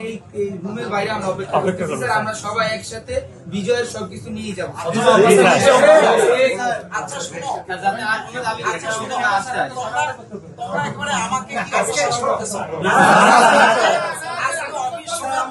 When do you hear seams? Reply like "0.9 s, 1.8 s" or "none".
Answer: none